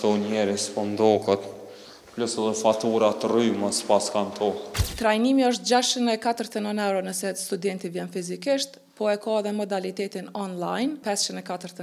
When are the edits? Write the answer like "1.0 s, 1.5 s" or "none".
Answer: 4.8 s, 11.0 s